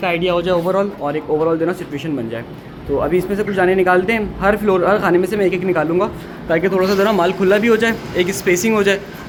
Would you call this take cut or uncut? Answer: uncut